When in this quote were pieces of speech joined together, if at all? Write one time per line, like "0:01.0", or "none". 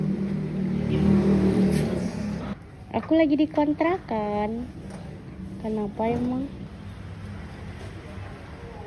0:02.4
0:06.7